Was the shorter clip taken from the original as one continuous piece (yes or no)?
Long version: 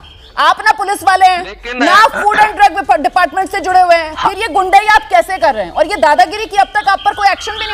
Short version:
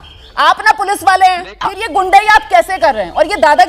no